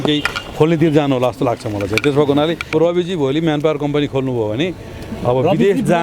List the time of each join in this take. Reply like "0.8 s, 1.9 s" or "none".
2.7 s